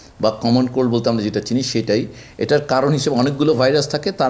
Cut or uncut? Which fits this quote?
uncut